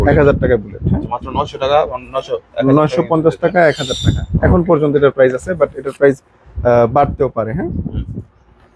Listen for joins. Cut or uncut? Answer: uncut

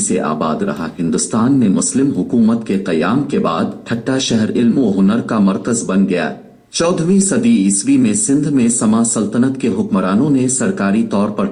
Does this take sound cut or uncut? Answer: uncut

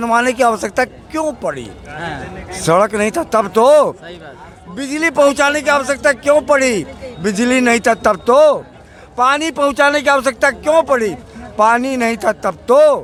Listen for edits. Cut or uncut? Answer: uncut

